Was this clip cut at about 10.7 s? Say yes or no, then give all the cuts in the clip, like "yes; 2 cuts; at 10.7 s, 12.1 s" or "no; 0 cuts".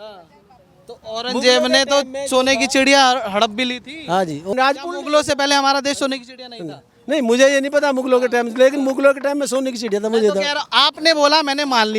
no; 1 cut; at 4.5 s